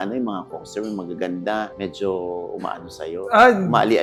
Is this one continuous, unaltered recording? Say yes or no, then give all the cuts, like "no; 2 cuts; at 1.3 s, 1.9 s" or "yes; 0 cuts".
yes; 0 cuts